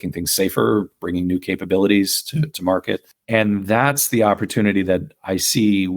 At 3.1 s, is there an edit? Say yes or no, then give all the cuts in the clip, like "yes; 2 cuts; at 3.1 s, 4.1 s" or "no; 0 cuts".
yes; 1 cut; at 3.1 s